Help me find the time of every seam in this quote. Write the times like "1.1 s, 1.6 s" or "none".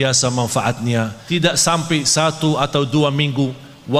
1.2 s

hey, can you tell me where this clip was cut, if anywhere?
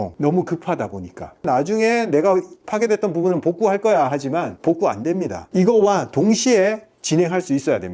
1.4 s, 4.5 s, 5.4 s

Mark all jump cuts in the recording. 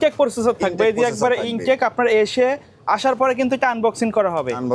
none

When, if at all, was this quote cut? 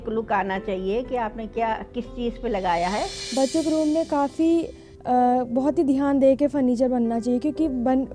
3.2 s

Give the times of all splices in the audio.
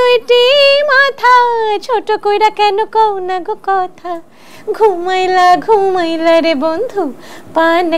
none

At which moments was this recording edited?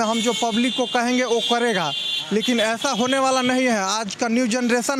none

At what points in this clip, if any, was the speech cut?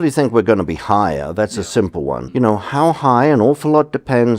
2.2 s

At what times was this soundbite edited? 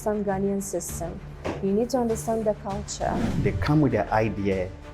3.4 s

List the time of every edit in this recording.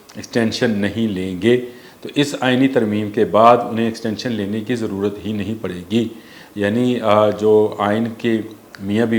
none

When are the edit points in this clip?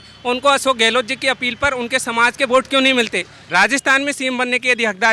3.4 s

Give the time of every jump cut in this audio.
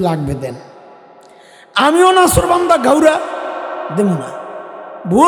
none

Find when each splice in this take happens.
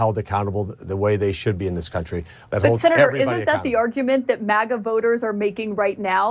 2.4 s

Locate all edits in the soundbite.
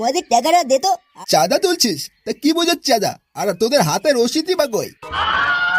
1.1 s

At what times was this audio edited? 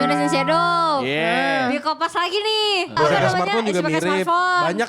3.0 s

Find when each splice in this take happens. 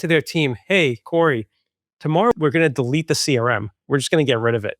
2.3 s, 3.8 s

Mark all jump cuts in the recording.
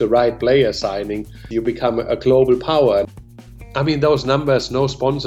1.4 s, 3.1 s

